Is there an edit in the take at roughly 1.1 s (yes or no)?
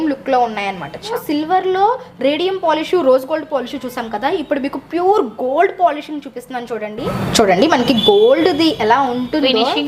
yes